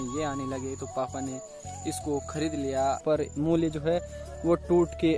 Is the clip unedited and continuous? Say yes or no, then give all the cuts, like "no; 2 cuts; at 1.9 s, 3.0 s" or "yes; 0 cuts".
no; 1 cut; at 3.0 s